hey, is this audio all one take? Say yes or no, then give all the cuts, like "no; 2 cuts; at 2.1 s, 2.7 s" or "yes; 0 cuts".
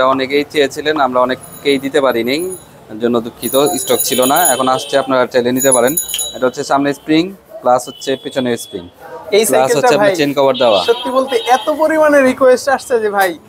yes; 0 cuts